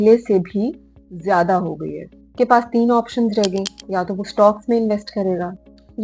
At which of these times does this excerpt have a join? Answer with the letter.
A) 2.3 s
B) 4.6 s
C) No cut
A